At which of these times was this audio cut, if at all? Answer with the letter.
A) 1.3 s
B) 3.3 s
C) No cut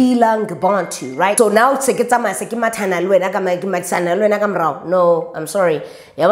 A